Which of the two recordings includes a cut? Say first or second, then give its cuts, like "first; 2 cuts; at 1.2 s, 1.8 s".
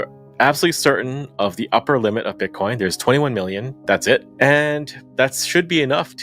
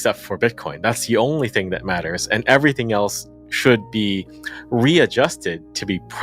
first; 1 cut; at 4.3 s